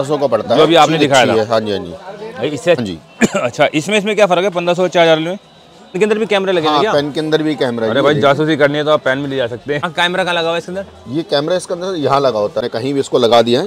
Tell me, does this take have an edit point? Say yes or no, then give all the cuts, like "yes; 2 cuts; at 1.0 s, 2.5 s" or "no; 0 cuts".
yes; 4 cuts; at 2.8 s, 6.0 s, 9.9 s, 12.6 s